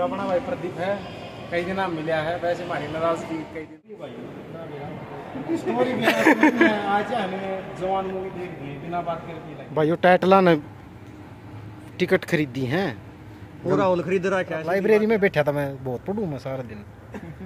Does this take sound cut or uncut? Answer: cut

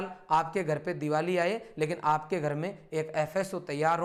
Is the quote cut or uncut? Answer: uncut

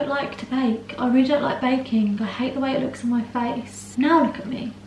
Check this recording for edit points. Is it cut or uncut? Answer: cut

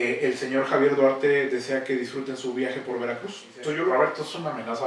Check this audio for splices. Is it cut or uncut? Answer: cut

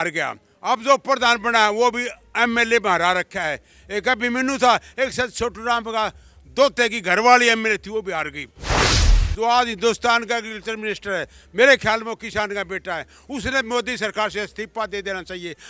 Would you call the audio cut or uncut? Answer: cut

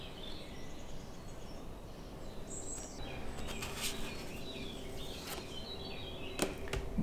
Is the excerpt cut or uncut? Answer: cut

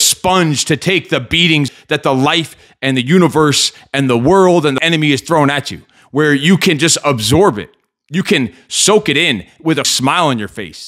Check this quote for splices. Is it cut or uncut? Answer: cut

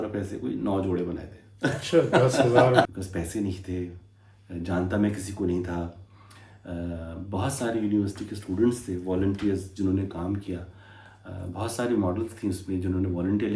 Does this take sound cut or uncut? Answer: cut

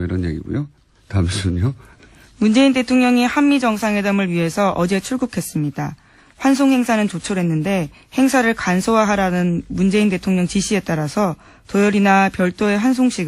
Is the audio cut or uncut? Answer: cut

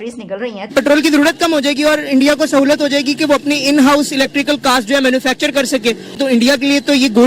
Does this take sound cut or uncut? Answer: cut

